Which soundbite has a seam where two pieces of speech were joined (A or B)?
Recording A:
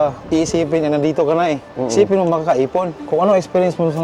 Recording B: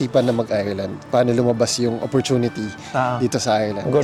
A